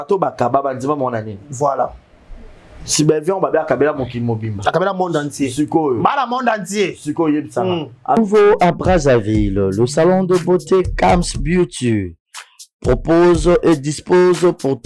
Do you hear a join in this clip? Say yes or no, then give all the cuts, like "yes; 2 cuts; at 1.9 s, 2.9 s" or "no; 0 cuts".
yes; 1 cut; at 8.2 s